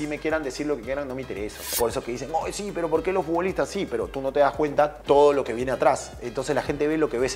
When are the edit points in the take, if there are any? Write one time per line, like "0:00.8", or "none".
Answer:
0:01.6
0:05.0